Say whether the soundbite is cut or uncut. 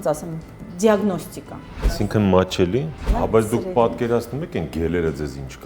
cut